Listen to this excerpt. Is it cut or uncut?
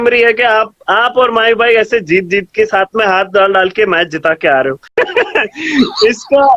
cut